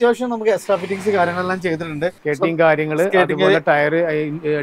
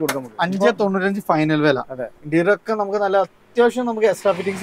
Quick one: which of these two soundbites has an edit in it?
first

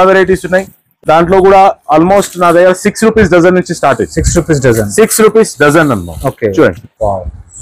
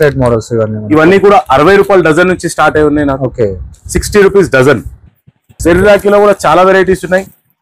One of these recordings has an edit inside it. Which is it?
second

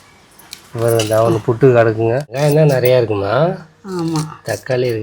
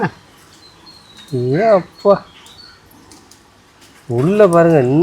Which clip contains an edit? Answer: first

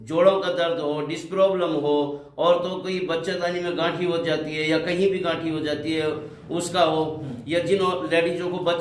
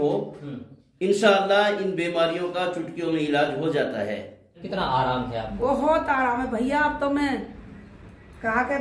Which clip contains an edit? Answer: second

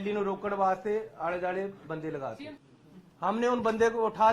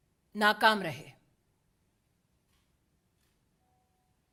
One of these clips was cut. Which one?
first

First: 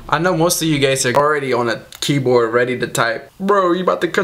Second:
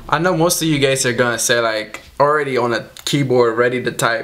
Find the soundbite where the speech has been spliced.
first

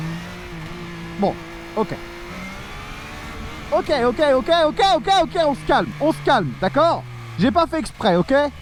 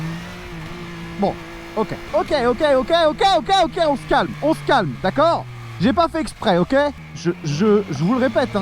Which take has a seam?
second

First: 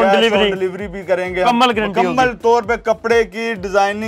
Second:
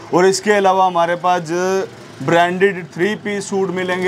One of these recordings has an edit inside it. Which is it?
first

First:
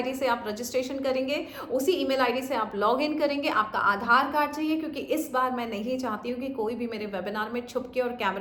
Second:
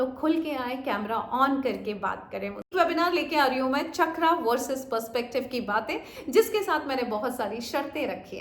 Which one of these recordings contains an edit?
second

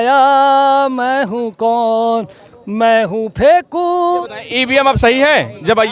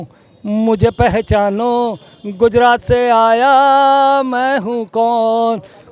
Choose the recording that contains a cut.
first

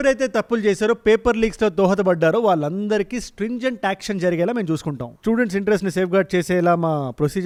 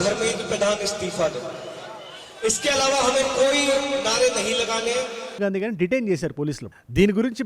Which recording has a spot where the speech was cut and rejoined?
second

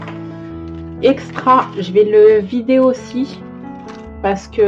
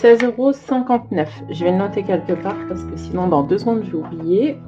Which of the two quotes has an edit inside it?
first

